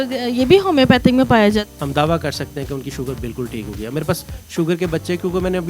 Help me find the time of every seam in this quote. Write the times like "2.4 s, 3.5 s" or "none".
1.8 s